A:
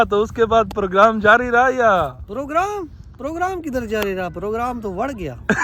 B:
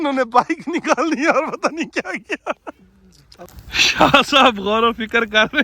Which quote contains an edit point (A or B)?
B